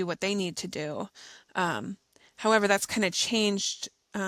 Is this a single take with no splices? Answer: yes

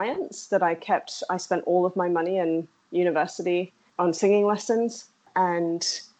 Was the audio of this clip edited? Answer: yes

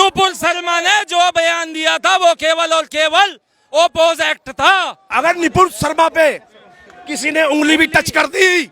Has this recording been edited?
yes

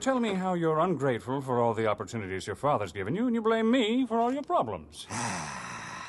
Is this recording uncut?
yes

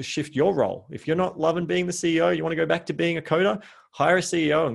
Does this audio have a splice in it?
no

